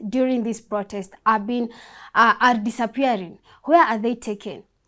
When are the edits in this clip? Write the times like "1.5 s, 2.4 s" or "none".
none